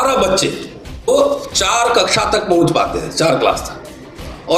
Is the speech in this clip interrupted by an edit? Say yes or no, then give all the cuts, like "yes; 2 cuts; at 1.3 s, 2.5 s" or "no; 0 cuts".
yes; 1 cut; at 1.1 s